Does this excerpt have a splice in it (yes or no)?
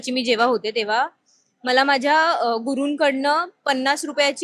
no